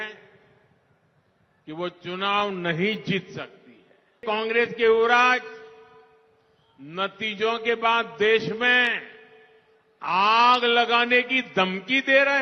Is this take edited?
yes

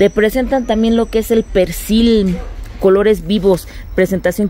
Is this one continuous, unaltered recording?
yes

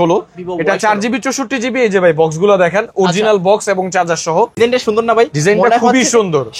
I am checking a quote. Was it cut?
yes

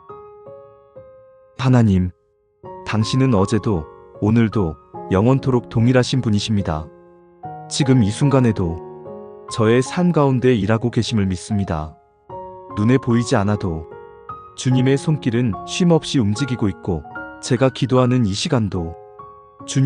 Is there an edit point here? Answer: yes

